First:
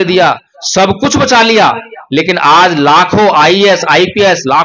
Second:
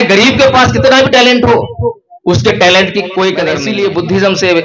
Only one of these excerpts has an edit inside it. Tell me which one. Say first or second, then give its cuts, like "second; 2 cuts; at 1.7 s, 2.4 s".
second; 1 cut; at 3.6 s